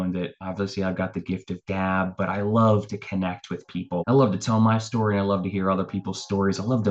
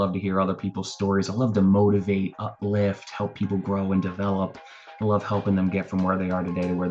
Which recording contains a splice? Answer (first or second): first